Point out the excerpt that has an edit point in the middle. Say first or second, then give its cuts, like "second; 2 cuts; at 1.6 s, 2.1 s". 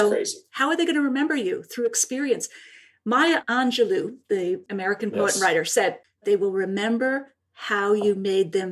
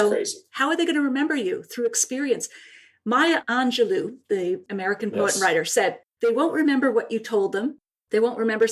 first; 1 cut; at 6.2 s